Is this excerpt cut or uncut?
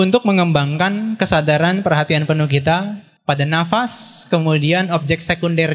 cut